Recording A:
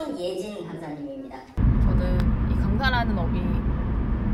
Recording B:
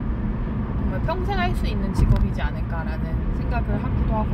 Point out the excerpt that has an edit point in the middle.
A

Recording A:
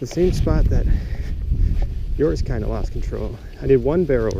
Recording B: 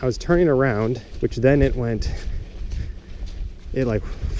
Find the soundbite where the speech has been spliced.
B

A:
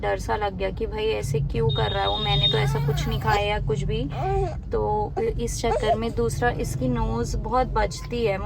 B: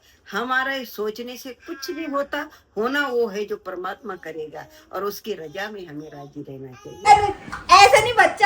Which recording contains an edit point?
B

